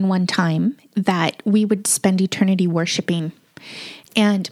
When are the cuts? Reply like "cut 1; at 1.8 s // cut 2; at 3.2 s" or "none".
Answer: none